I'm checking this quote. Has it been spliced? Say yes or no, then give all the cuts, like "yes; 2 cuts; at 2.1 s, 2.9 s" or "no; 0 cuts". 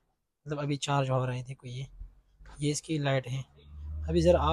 no; 0 cuts